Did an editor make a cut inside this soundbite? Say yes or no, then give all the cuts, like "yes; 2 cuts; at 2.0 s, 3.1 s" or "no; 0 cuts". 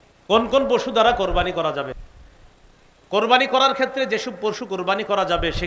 yes; 1 cut; at 2.0 s